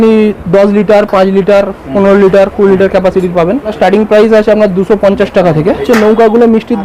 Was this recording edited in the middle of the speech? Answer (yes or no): yes